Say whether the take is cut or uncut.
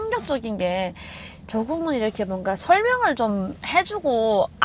uncut